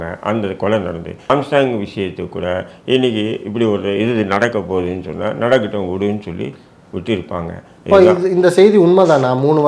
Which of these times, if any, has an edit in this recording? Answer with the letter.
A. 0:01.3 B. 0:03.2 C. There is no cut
A